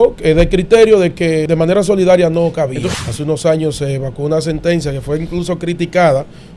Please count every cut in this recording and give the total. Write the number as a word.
two